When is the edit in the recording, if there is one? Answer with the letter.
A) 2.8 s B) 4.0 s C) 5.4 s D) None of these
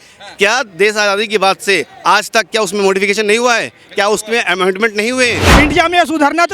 C